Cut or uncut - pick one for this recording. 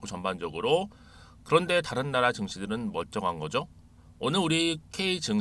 uncut